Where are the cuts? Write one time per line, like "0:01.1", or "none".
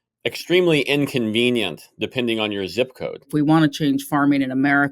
0:03.3